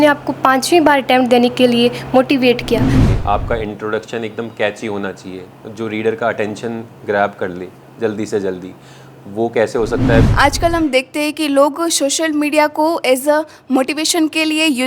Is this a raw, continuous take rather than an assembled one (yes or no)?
no